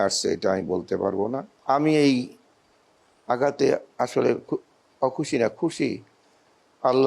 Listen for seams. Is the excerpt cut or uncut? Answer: cut